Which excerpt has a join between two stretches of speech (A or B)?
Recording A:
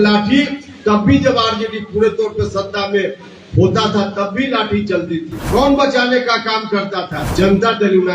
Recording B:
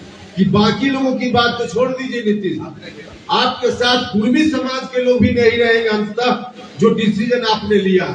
A